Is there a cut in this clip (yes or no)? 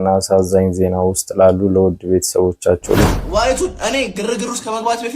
yes